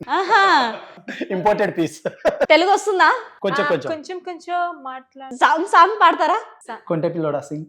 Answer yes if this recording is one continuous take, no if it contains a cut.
no